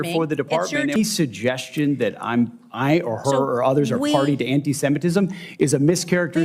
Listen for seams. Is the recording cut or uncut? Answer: cut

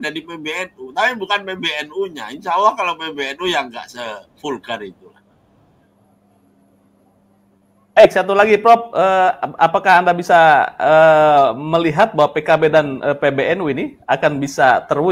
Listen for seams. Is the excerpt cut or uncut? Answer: uncut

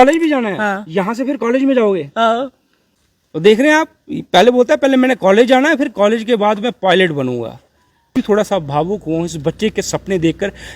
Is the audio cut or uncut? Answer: cut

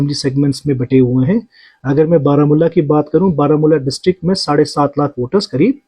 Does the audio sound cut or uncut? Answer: uncut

